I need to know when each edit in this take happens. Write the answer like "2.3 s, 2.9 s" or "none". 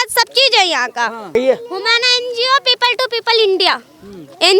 1.4 s